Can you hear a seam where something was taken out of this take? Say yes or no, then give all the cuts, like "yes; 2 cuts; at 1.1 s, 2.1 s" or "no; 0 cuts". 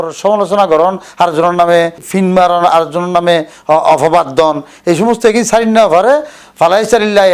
yes; 1 cut; at 2.0 s